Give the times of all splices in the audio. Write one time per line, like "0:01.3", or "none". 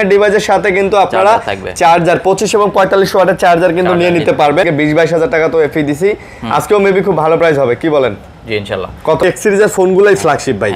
0:04.7
0:09.2